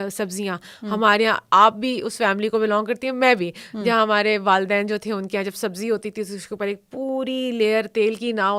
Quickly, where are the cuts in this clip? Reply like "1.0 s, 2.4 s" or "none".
none